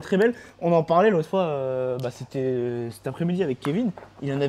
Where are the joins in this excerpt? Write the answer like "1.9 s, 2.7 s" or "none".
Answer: none